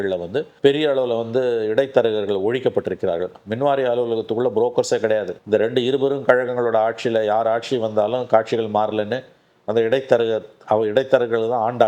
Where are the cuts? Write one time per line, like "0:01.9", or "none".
0:05.3